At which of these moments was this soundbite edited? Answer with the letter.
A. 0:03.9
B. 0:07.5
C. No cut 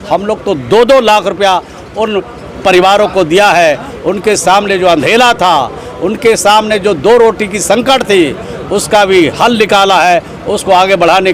C